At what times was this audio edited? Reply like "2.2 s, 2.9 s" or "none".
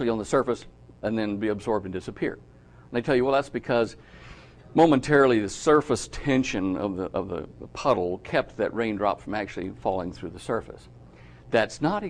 7.1 s